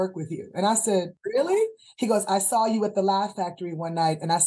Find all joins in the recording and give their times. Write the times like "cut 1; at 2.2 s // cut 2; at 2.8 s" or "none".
cut 1; at 1.1 s